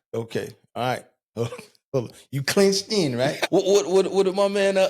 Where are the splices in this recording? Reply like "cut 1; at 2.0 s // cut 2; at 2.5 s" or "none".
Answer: cut 1; at 3.4 s